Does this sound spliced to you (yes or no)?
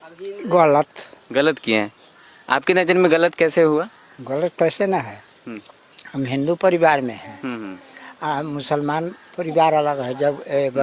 no